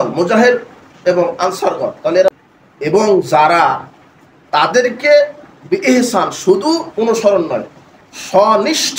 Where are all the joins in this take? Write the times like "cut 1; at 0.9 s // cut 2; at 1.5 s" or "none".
cut 1; at 2.4 s